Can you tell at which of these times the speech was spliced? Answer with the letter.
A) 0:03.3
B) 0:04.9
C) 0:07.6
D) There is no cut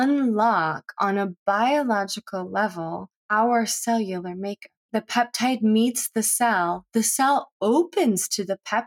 B